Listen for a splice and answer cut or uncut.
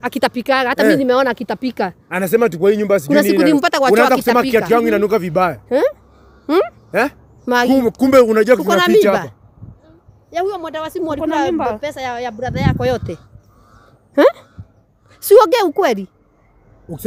uncut